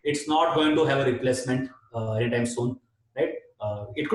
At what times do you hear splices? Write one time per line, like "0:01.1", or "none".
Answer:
none